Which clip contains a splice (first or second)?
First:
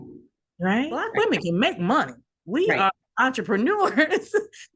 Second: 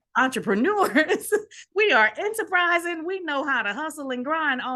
first